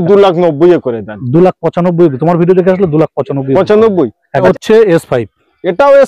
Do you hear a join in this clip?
yes; 1 cut; at 4.4 s

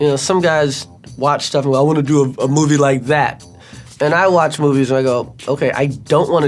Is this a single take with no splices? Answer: yes; 0 cuts

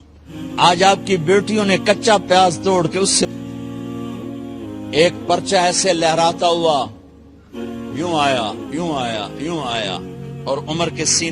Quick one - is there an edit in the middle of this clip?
yes; 1 cut; at 3.2 s

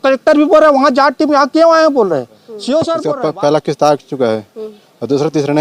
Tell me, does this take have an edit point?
yes; 1 cut; at 3.0 s

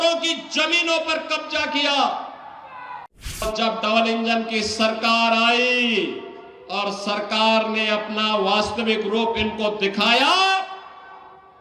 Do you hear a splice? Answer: yes; 1 cut; at 3.4 s

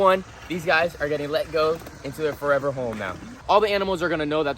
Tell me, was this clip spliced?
yes; 1 cut; at 3.3 s

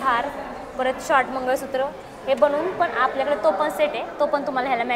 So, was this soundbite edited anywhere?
no; 0 cuts

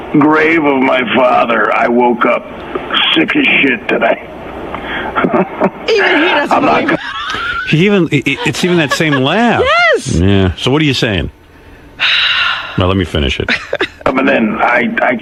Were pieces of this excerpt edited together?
no; 0 cuts

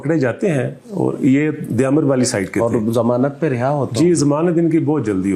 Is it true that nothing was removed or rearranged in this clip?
yes; 0 cuts

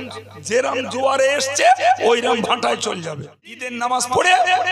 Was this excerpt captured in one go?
no; 1 cut; at 3.6 s

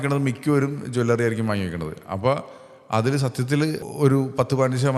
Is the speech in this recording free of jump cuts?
no; 1 cut; at 3.9 s

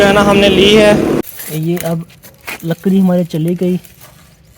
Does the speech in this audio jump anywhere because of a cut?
yes; 1 cut; at 1.2 s

